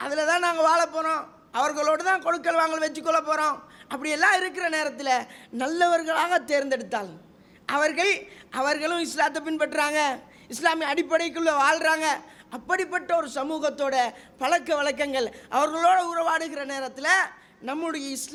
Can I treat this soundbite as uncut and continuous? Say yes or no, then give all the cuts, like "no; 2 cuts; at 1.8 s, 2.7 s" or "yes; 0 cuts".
yes; 0 cuts